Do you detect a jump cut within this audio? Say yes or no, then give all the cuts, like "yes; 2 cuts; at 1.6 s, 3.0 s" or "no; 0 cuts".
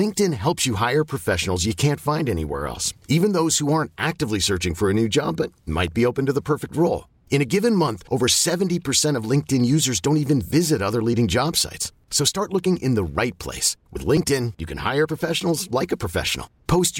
no; 0 cuts